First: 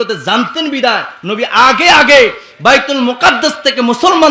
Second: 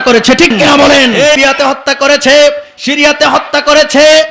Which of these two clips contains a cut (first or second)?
second